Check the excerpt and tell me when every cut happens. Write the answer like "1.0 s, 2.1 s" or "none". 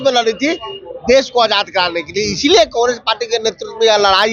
none